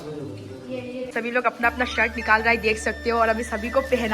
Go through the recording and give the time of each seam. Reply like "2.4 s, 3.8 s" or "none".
1.1 s

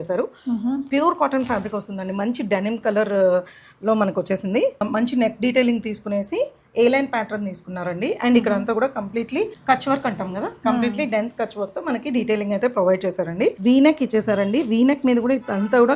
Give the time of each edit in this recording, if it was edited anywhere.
4.8 s, 9.6 s, 13.6 s

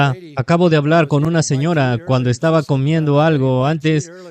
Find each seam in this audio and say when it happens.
none

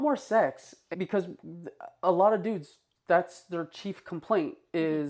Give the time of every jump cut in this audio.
0.9 s

